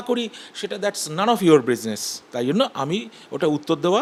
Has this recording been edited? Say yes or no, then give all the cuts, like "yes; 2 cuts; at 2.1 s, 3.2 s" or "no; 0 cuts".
no; 0 cuts